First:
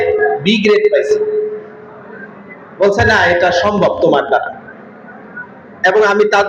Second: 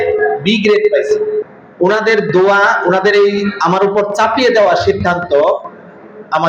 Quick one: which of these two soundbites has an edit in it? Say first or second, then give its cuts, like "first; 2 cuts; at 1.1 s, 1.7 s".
second; 1 cut; at 1.6 s